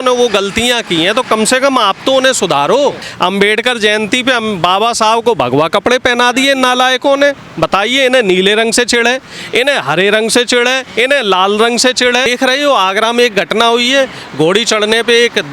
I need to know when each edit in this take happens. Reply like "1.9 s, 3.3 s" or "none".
3.1 s, 12.3 s